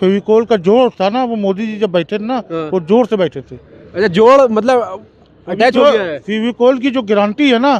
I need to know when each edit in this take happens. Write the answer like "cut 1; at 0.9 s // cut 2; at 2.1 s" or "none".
none

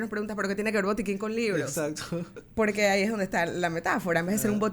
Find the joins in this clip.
cut 1; at 2.4 s

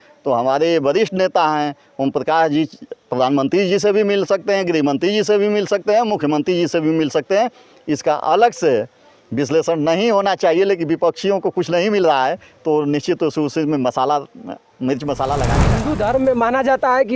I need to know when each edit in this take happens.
cut 1; at 15.7 s

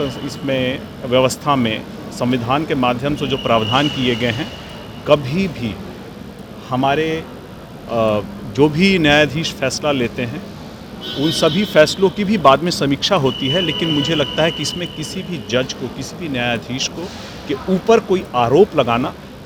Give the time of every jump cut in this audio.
none

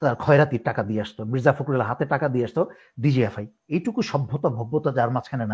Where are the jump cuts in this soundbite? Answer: cut 1; at 3.6 s

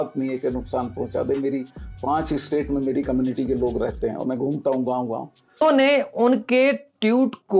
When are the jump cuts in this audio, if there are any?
cut 1; at 5.6 s

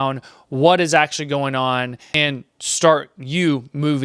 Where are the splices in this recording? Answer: cut 1; at 2.1 s

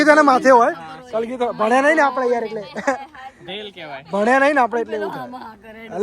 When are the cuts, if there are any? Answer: none

